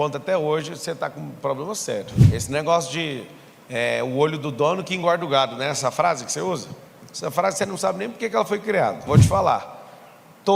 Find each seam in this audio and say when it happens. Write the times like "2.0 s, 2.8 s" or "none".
2.2 s, 9.1 s

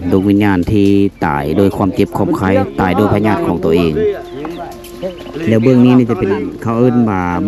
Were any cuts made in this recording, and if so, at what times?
none

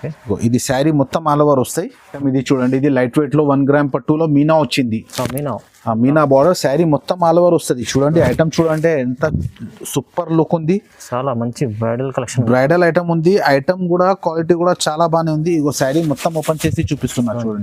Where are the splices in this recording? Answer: 2.2 s

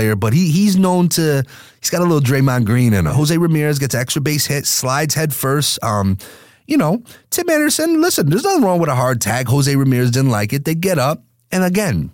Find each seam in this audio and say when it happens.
3.1 s

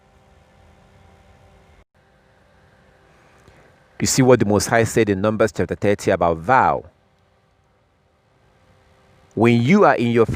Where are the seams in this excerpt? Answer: 1.9 s

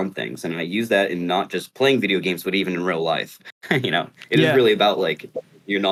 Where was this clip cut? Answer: none

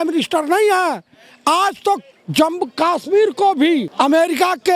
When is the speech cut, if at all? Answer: 2.2 s, 3.9 s

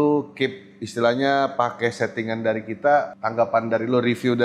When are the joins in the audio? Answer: 3.2 s

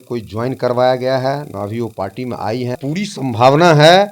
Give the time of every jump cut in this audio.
2.8 s

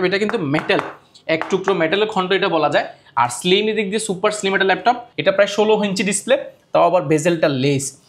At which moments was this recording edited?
5.1 s

